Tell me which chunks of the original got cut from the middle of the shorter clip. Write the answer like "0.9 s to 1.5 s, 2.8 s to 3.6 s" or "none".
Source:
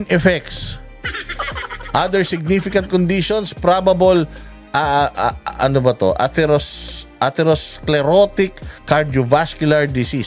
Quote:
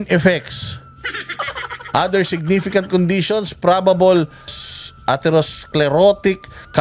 4.6 s to 6.7 s